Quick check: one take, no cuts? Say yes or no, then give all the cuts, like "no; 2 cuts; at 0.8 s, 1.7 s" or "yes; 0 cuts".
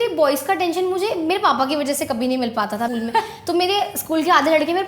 no; 1 cut; at 2.9 s